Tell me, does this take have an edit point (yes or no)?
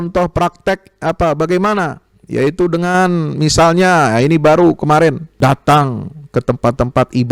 yes